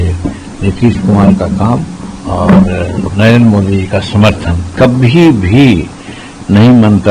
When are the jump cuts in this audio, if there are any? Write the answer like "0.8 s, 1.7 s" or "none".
4.7 s